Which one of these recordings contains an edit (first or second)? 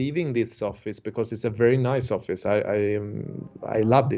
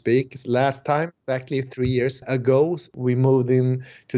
second